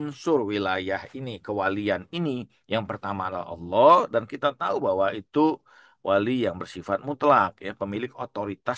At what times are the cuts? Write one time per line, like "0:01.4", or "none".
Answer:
none